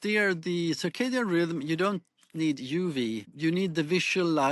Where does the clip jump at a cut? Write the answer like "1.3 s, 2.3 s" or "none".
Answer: 3.3 s

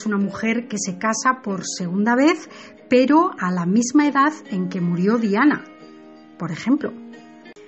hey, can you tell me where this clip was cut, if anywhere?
none

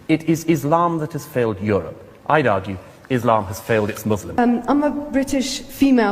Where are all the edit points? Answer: 4.4 s

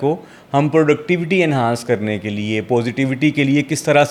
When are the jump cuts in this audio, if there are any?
none

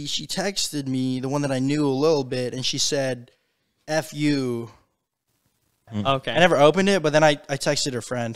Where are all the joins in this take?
5.9 s

